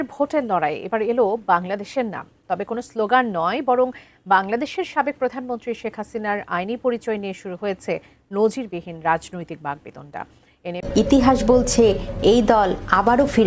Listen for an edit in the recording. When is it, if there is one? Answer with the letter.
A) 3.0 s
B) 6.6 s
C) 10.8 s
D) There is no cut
C